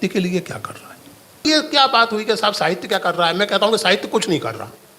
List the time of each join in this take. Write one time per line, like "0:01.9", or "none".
0:01.4